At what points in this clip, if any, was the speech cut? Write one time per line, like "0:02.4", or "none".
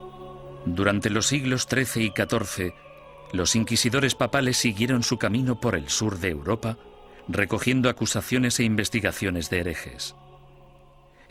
none